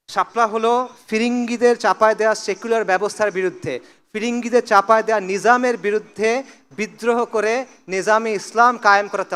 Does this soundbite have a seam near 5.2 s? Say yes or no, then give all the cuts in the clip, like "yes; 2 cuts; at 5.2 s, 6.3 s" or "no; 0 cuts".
no; 0 cuts